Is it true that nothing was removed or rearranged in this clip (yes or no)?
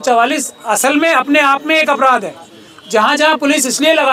yes